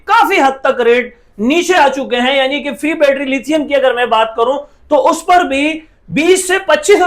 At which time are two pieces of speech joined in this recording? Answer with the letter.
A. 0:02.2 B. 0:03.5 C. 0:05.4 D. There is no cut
D